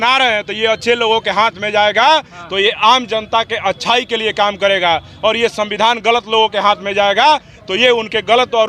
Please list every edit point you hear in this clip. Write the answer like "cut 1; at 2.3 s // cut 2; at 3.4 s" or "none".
none